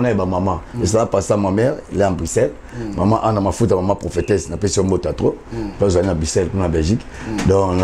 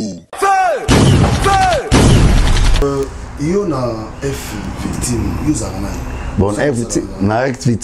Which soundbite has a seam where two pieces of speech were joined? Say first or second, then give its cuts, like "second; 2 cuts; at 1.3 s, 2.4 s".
second; 1 cut; at 2.8 s